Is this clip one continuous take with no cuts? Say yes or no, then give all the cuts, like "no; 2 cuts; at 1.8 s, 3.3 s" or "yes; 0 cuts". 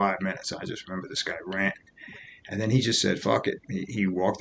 yes; 0 cuts